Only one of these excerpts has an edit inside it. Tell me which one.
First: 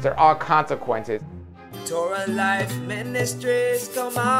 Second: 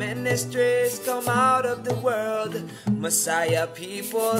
first; 1 cut; at 1.7 s

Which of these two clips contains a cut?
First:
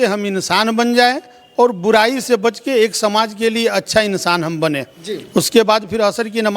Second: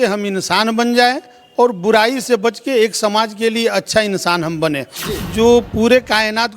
second; 1 cut; at 5.2 s

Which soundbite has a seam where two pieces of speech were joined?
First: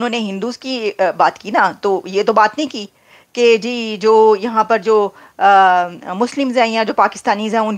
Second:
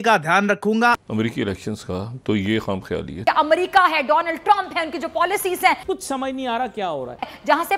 second; 3 cuts; at 1.0 s, 3.1 s, 5.8 s

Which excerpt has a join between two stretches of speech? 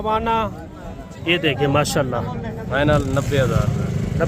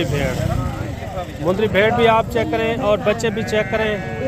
first; 1 cut; at 2.6 s

